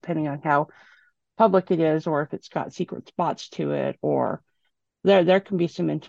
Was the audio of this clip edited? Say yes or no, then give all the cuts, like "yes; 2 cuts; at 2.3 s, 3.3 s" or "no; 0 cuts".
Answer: no; 0 cuts